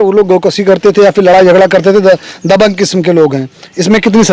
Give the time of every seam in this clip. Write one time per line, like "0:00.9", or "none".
none

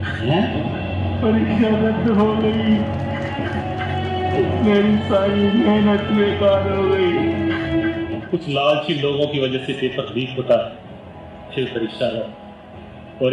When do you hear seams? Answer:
0:08.2

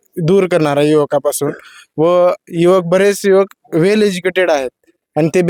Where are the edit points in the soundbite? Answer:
none

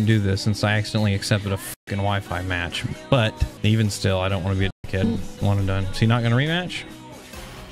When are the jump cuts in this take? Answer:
0:03.5

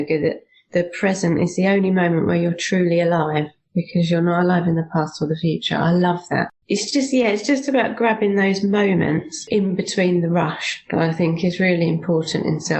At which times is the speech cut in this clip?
0:06.6
0:09.3

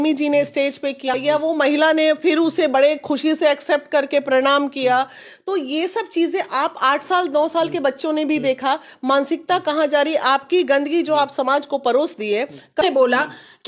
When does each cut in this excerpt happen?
0:01.1
0:12.8

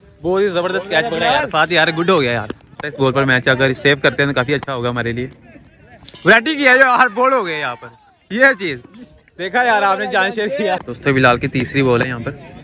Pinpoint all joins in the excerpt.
0:02.8
0:10.9

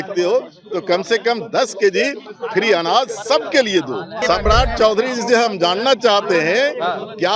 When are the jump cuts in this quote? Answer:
0:04.1

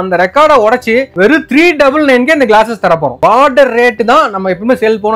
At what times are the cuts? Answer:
0:03.1

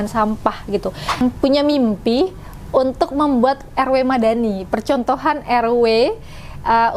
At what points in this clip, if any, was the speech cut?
0:01.2

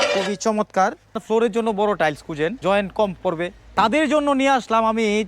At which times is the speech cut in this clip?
0:01.2
0:02.6
0:03.6

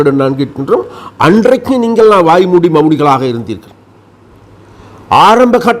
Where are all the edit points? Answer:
none

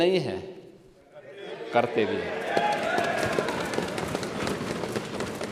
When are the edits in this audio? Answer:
none

